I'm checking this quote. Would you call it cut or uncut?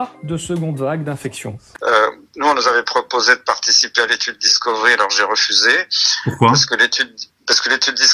cut